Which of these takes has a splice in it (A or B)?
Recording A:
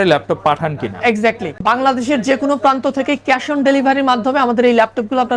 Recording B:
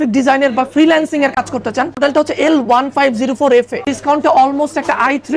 B